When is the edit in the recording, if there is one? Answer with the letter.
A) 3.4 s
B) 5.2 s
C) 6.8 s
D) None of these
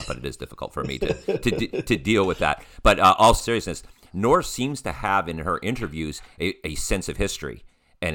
A